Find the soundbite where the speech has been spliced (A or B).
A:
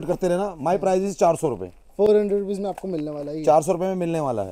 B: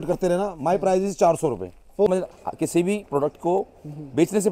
B